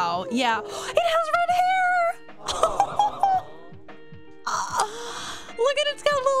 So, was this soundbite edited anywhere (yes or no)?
no